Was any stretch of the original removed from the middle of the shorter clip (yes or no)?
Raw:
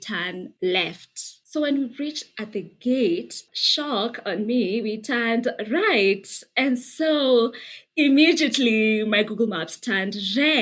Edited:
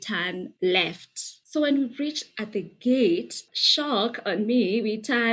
no